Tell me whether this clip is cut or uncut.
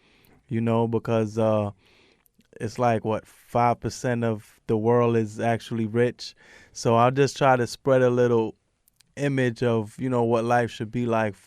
cut